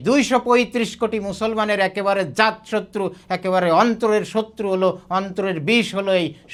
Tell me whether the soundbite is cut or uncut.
uncut